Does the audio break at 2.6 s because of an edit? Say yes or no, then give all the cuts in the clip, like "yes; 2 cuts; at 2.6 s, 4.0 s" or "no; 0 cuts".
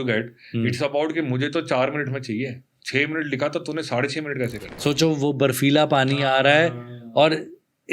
no; 1 cut; at 4.6 s